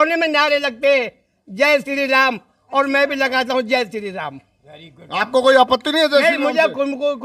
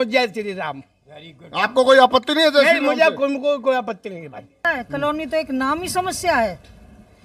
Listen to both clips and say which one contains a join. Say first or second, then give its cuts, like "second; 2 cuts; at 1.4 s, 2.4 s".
second; 1 cut; at 4.7 s